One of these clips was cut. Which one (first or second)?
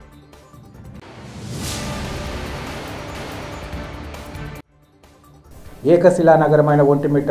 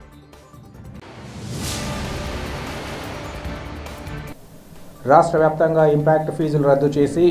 second